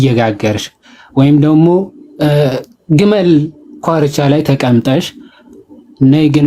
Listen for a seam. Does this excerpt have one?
no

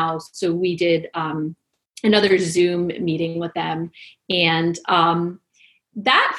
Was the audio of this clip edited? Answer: no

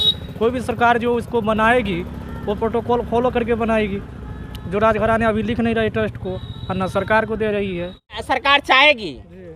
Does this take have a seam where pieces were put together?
no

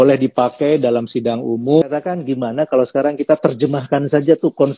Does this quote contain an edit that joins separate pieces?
yes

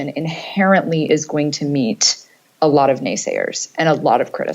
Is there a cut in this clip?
no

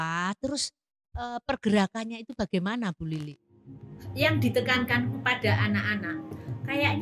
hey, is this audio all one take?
no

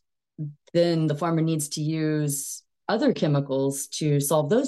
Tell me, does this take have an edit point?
no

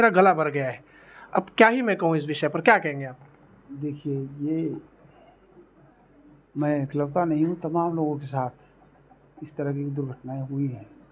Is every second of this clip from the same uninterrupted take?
yes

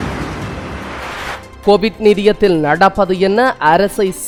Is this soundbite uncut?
yes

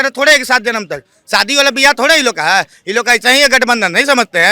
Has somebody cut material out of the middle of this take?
no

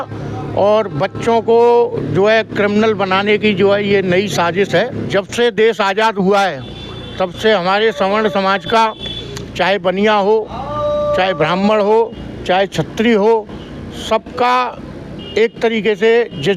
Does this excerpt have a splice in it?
yes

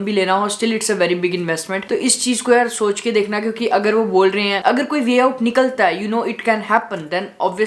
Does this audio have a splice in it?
no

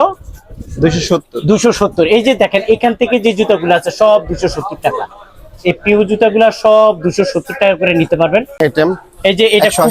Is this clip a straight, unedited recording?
no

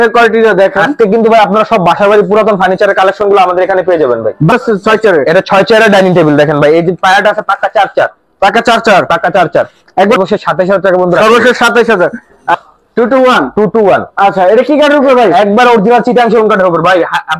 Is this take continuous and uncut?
no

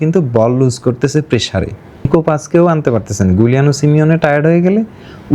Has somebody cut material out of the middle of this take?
yes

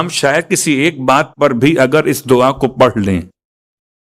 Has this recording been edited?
no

